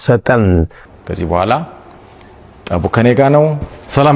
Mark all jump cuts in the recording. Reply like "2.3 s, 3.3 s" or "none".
1.0 s